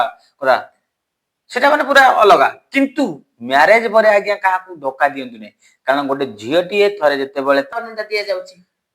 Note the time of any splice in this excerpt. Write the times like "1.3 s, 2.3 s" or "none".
7.7 s